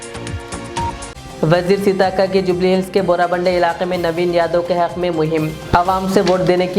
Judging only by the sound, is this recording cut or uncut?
cut